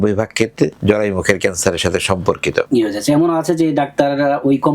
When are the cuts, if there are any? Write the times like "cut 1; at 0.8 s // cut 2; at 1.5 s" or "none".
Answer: cut 1; at 2.7 s